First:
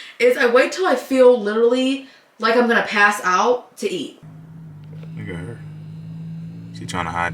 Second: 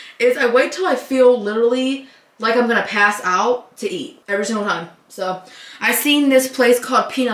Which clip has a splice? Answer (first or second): first